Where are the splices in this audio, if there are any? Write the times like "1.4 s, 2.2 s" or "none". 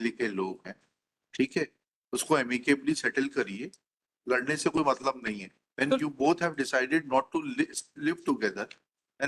none